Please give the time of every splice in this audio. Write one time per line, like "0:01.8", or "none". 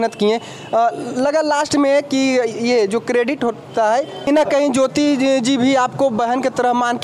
0:04.3